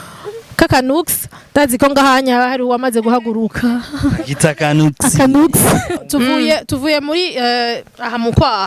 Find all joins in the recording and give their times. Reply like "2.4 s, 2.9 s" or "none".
6.0 s